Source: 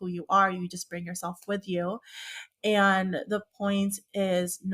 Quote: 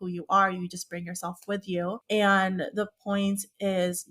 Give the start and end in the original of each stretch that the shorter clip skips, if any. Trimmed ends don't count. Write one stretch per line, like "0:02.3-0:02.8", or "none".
0:02.0-0:02.5